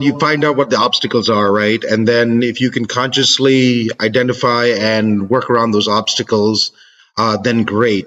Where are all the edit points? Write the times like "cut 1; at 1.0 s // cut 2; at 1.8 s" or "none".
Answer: none